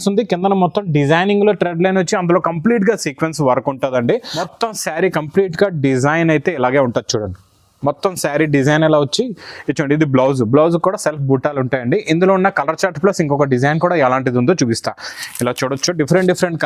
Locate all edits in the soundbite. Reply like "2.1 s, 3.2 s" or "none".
4.4 s, 15.1 s

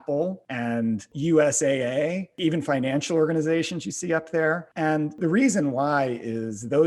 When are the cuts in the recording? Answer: 1.0 s, 2.3 s, 5.1 s

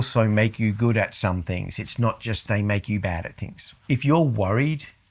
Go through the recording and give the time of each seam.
3.7 s

